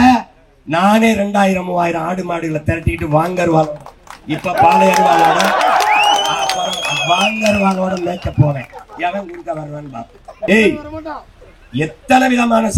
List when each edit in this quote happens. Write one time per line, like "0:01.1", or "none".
0:10.5

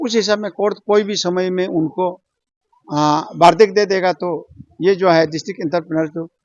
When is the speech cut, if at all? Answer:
none

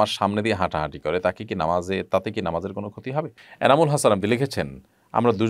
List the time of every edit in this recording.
0:03.4

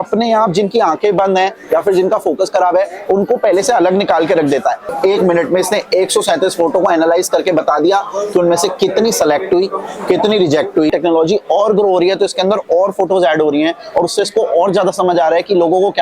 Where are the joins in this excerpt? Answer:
0:04.9
0:10.9

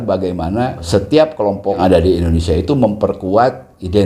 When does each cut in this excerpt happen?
0:00.8
0:01.8

